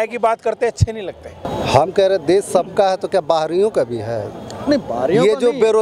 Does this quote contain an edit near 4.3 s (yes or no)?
no